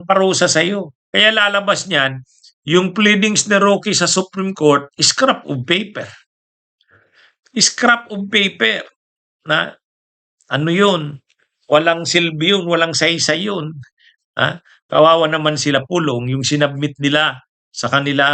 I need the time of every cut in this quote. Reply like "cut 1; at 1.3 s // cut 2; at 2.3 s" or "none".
cut 1; at 1.0 s

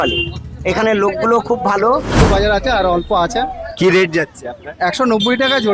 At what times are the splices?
cut 1; at 2.2 s

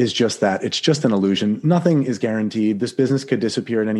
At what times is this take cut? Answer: none

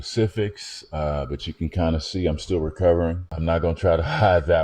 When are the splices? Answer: cut 1; at 1.4 s

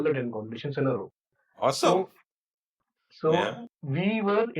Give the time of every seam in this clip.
cut 1; at 2.5 s

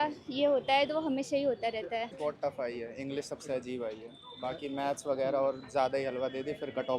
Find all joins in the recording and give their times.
cut 1; at 2.1 s

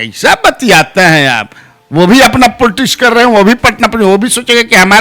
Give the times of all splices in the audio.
none

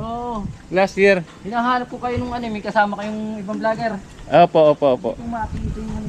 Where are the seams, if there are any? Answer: none

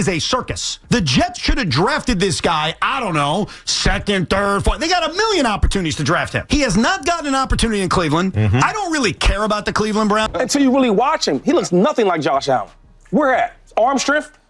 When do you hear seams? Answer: cut 1; at 10.3 s

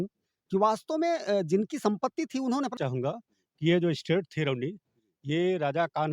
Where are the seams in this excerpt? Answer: cut 1; at 2.8 s

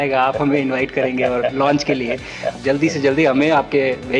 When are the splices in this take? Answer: cut 1; at 2.5 s

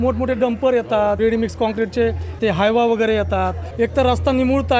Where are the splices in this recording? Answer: cut 1; at 1.2 s // cut 2; at 2.4 s // cut 3; at 3.6 s

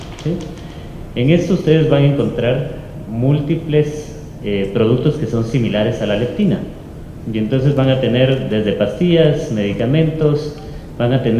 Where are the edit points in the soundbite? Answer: cut 1; at 8.5 s

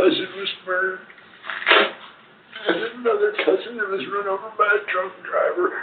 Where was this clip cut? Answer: none

